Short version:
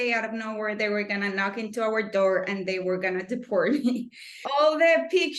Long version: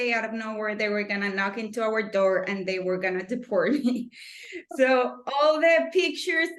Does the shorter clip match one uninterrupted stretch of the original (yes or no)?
no